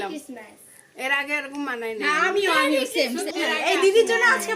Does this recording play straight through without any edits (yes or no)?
no